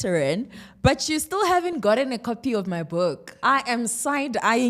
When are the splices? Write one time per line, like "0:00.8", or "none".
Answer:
0:03.3